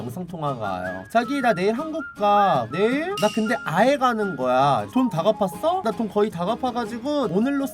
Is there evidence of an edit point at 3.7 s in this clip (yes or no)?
no